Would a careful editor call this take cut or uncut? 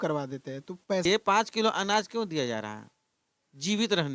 cut